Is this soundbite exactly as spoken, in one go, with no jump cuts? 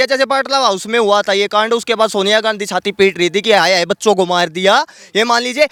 yes; 0 cuts

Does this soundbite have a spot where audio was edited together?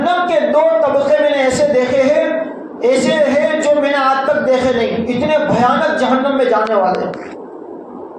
no; 0 cuts

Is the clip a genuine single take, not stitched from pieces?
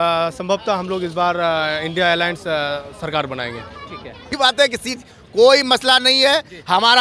no; 1 cut; at 4.3 s

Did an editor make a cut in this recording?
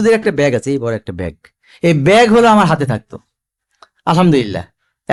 no; 0 cuts

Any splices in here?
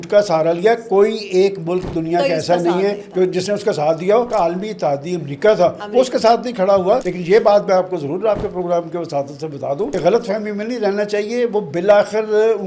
yes; 3 cuts; at 4.3 s, 7.1 s, 9.9 s

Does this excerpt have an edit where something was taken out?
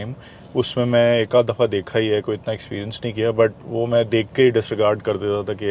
no; 0 cuts

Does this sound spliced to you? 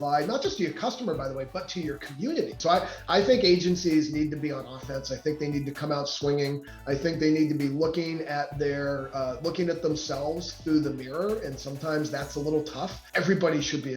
yes; 2 cuts; at 2.6 s, 13.0 s

